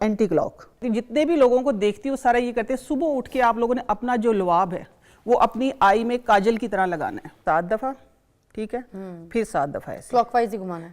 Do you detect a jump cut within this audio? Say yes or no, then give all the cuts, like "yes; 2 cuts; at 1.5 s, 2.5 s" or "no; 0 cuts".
yes; 2 cuts; at 0.8 s, 7.3 s